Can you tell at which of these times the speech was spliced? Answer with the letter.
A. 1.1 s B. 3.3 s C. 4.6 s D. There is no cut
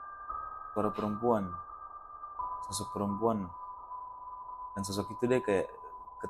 D